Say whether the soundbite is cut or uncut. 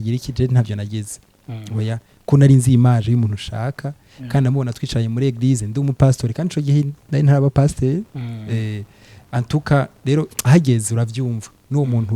uncut